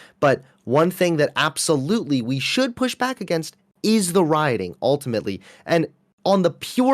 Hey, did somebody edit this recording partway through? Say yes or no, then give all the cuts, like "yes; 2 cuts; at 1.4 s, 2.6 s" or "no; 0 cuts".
no; 0 cuts